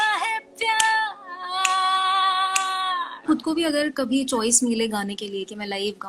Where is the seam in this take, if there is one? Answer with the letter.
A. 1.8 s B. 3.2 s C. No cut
B